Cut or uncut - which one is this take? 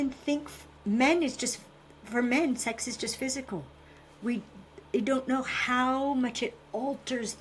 uncut